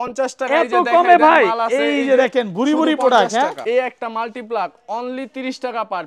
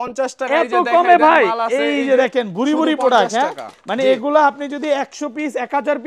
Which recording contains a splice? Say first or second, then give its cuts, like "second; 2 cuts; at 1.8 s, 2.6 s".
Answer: first; 1 cut; at 3.6 s